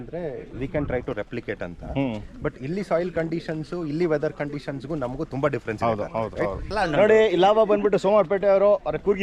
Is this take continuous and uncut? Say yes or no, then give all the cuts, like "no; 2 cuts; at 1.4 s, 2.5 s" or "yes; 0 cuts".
no; 1 cut; at 6.6 s